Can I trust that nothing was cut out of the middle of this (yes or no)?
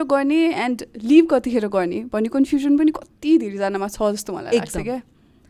yes